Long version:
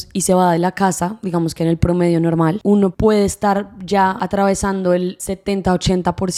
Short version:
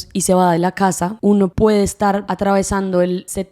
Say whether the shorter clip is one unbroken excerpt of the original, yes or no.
no